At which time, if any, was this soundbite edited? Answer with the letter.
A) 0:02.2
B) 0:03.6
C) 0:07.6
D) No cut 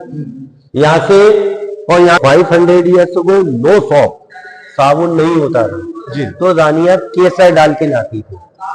A